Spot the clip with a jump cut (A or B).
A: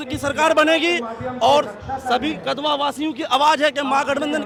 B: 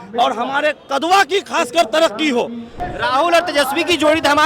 B